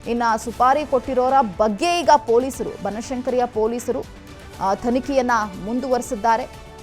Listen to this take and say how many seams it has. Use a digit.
1